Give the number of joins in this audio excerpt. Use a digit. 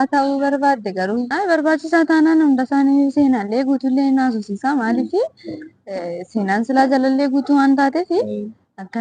1